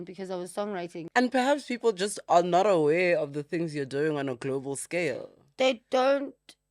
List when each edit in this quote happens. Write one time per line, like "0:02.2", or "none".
0:01.1